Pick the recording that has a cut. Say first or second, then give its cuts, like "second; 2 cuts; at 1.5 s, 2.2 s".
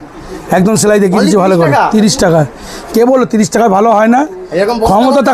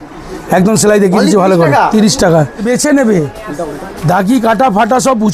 second; 1 cut; at 2.6 s